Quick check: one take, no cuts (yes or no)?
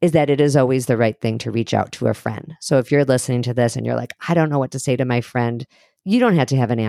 no